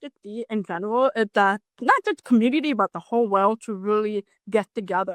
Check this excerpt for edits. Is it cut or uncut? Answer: cut